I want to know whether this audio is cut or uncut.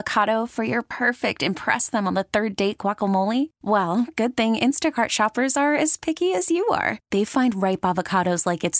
uncut